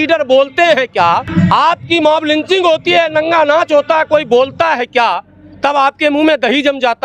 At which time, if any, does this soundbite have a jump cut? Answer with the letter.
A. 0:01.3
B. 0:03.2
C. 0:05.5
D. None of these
A